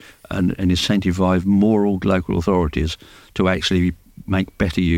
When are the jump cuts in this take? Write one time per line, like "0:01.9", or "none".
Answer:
none